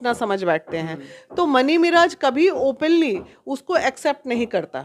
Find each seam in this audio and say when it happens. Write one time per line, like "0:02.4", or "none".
none